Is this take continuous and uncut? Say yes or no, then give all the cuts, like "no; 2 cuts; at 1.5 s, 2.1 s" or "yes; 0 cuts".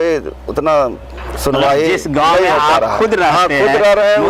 yes; 0 cuts